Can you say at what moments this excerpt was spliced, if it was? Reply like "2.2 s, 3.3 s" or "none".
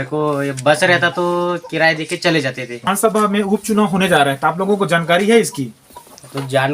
2.8 s